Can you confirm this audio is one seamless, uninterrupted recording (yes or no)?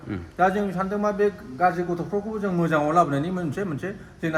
yes